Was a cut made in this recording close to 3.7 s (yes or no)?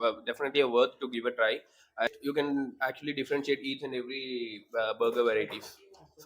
no